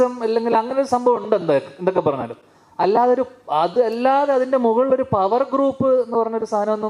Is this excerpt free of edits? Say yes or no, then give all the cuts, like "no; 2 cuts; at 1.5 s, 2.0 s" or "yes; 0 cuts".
yes; 0 cuts